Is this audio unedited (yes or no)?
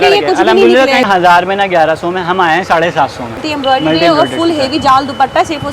no